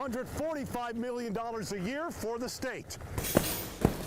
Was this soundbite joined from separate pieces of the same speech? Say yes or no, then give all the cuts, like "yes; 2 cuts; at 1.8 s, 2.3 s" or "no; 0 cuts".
yes; 1 cut; at 3.1 s